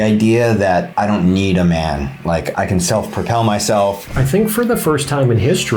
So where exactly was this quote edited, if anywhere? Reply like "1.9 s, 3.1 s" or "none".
0.9 s, 2.5 s, 4.1 s